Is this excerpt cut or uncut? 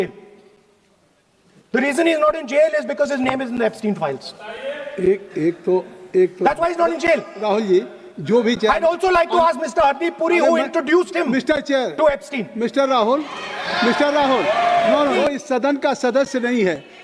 cut